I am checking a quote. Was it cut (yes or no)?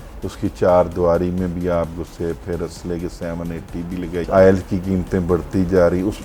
yes